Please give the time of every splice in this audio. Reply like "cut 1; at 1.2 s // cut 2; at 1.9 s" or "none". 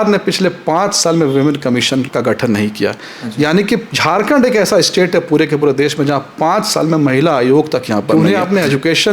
cut 1; at 2.1 s // cut 2; at 8.1 s

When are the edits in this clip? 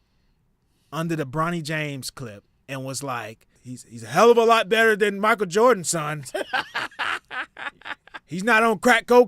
cut 1; at 3.6 s

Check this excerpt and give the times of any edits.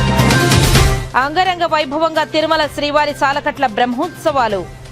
cut 1; at 1.0 s

